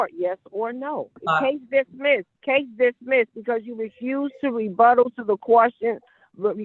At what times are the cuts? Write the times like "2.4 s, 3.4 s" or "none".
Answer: 1.2 s, 2.3 s

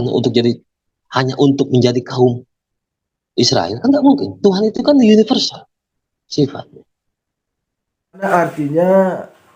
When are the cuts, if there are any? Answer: 8.3 s

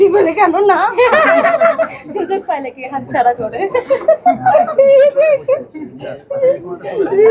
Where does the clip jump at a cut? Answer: none

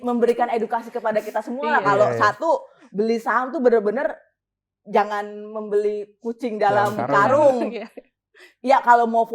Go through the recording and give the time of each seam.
none

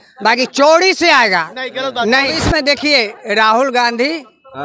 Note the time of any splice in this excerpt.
2.3 s

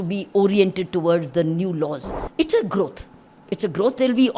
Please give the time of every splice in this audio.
2.1 s

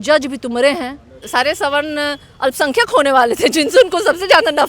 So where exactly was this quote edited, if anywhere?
1.3 s

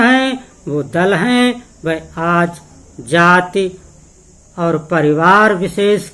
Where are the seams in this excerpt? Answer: none

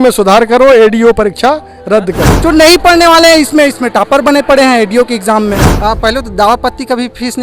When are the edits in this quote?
2.3 s, 5.7 s

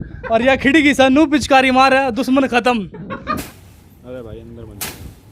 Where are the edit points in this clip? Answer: 3.5 s

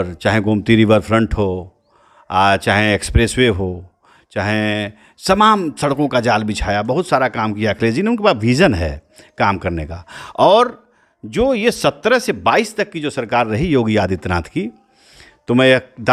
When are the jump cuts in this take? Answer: none

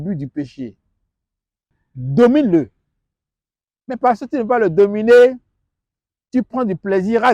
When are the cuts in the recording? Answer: 1.7 s

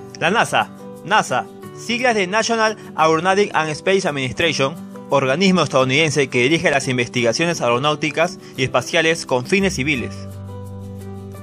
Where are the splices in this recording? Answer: none

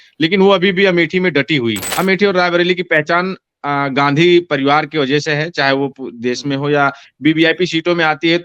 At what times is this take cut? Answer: 1.9 s

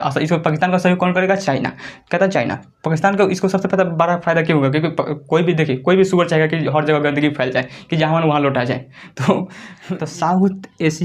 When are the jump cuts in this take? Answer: 9.7 s

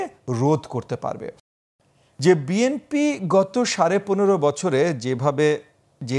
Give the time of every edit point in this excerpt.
1.5 s

